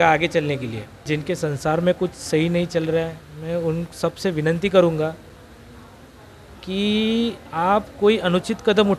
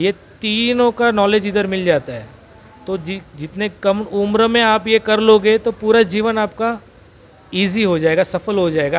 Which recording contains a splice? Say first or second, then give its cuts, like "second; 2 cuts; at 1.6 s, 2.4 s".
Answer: first; 1 cut; at 1.0 s